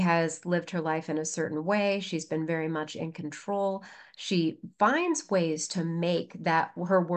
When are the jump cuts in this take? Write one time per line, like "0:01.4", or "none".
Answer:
none